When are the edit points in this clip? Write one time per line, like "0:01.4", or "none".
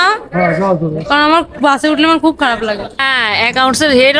0:03.0